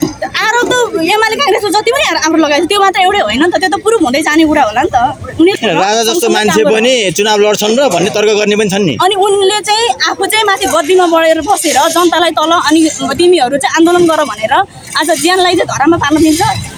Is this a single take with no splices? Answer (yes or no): no